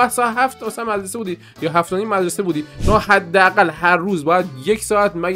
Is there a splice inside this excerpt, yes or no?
no